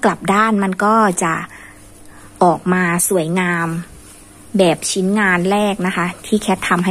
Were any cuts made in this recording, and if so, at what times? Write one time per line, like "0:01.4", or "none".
none